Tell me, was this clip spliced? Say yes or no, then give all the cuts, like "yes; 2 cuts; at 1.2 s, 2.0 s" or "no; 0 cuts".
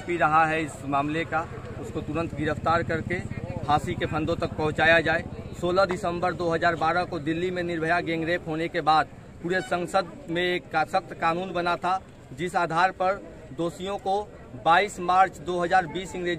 no; 0 cuts